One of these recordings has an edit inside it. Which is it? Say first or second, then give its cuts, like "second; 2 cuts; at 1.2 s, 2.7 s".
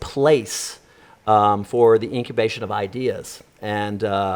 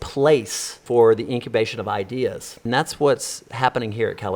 second; 2 cuts; at 0.8 s, 2.6 s